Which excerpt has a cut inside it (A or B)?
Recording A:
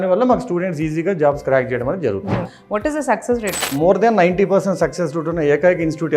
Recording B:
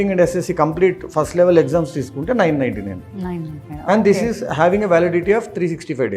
A